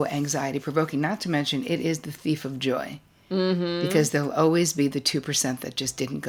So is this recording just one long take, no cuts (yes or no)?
yes